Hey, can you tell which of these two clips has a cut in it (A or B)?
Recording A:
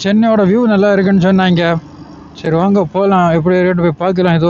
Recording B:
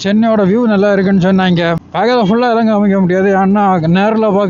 B